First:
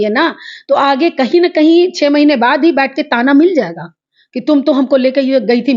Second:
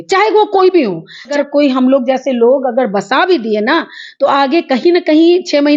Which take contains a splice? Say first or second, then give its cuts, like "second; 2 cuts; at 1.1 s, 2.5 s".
second; 1 cut; at 1.3 s